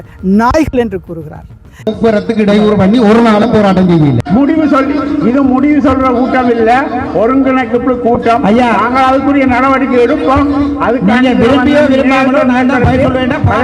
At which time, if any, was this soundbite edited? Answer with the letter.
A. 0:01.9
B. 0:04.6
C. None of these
A